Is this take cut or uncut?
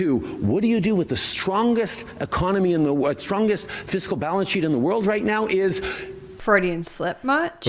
cut